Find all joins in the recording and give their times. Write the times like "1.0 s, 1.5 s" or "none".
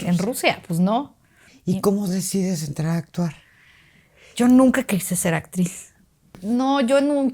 1.5 s, 6.4 s